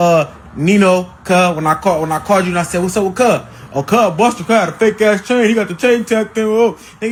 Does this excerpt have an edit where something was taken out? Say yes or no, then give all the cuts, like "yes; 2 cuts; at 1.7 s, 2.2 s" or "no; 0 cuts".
no; 0 cuts